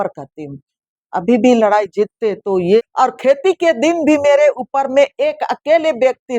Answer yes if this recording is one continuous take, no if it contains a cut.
no